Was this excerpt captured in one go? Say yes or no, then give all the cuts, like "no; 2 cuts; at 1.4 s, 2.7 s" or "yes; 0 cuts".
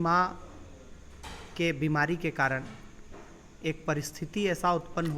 yes; 0 cuts